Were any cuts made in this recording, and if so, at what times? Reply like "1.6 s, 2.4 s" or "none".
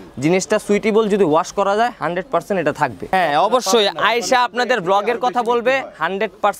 3.1 s